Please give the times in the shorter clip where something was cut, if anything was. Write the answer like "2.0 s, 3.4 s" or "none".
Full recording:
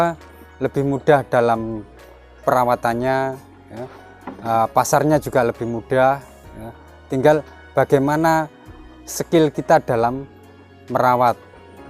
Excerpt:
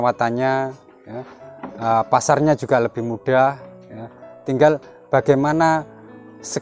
none